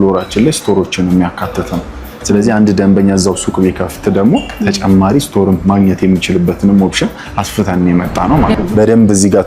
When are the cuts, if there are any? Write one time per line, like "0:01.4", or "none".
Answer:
0:08.5